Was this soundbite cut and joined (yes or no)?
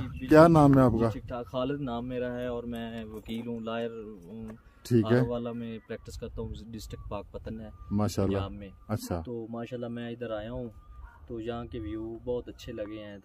no